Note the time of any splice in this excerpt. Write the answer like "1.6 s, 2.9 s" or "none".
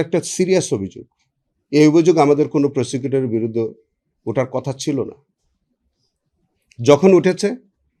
none